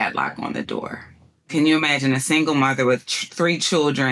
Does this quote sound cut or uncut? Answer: cut